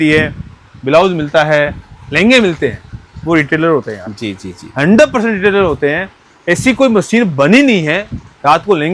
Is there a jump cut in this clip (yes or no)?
no